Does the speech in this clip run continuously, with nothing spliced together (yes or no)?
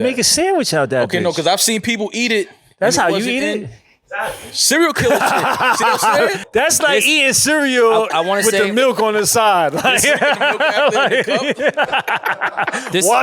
no